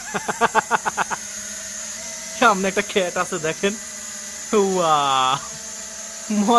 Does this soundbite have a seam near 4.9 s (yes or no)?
no